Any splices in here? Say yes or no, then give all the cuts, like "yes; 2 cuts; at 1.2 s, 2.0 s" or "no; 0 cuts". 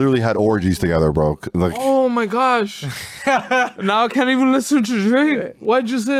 no; 0 cuts